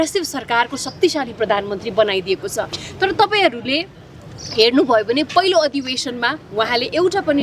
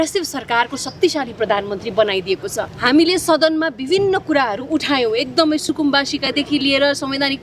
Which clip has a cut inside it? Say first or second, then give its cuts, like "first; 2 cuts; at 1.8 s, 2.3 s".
second; 1 cut; at 2.7 s